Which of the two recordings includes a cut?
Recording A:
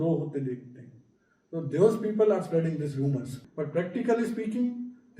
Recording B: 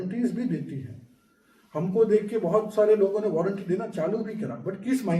A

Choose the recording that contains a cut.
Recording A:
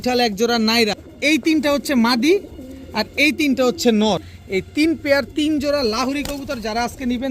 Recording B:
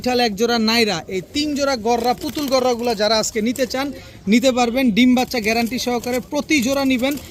A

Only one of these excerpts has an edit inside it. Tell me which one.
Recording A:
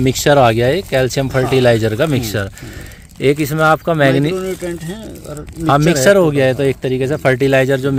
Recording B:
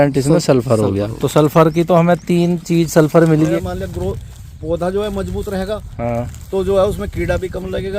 B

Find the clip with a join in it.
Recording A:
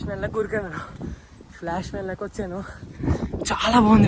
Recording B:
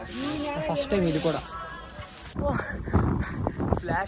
B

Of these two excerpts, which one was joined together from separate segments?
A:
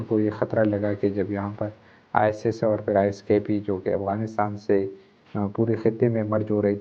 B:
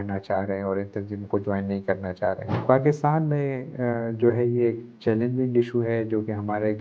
B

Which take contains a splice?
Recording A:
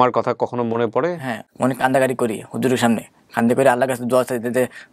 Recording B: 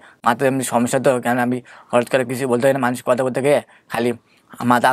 A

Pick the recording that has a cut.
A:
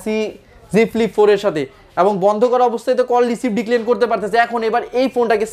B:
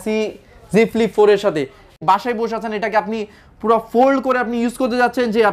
B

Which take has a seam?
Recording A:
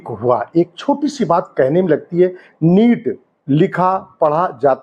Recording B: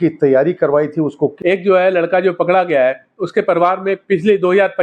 B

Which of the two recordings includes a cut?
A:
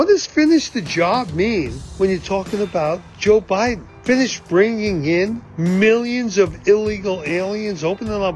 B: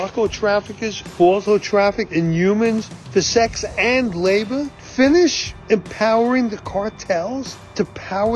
B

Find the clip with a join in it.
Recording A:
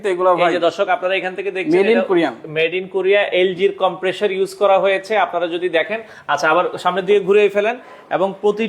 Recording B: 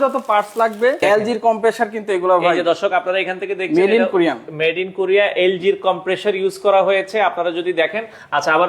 B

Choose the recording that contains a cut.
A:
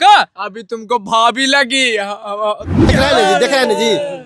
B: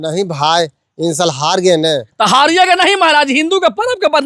A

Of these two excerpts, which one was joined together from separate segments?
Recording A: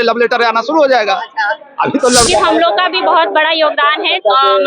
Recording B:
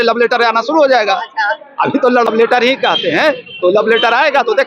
A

